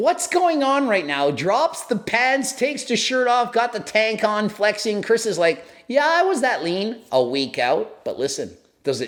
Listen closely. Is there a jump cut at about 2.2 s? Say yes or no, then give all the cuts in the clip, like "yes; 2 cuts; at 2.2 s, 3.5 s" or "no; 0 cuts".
no; 0 cuts